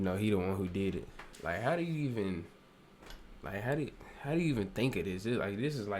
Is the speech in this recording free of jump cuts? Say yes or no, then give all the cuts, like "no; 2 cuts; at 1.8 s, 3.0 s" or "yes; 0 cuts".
no; 1 cut; at 1.2 s